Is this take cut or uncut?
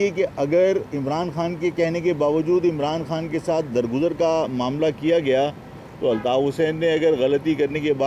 uncut